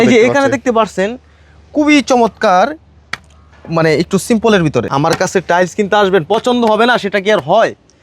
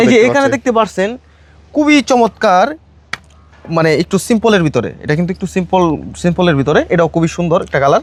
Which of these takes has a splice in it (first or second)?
first